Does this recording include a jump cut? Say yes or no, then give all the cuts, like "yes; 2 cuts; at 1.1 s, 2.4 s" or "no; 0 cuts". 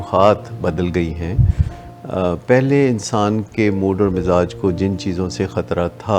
no; 0 cuts